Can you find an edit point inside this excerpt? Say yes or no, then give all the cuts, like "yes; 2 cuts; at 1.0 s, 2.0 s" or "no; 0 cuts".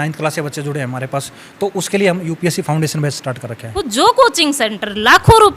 yes; 1 cut; at 3.8 s